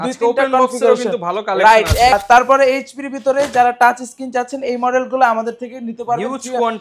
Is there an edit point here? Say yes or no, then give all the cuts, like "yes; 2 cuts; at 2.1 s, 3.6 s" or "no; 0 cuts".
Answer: yes; 1 cut; at 2.1 s